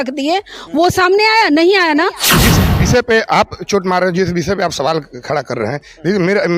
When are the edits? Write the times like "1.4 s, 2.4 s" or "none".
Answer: 2.4 s